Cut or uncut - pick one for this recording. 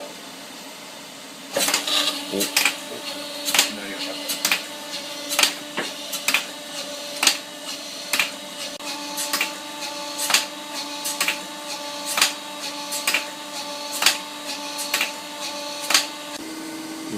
cut